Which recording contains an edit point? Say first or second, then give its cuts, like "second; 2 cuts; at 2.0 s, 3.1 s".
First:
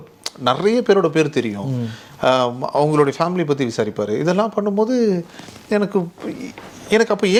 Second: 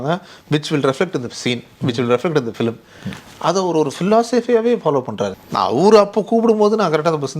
second; 1 cut; at 5.3 s